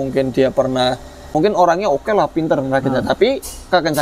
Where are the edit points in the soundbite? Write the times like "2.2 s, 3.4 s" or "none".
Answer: 1.2 s